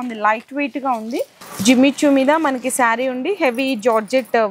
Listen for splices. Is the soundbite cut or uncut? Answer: cut